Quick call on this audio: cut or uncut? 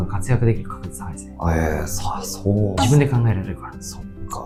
uncut